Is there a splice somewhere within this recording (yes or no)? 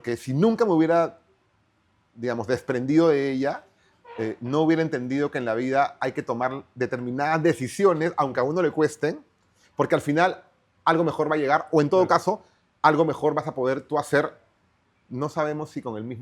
no